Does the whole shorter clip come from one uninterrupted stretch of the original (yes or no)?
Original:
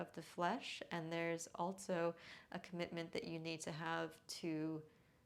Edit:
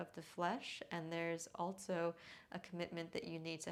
yes